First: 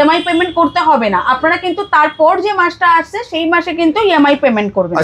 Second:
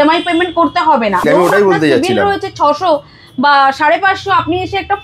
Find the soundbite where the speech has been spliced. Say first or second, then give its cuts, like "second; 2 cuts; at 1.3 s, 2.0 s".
second; 1 cut; at 1.2 s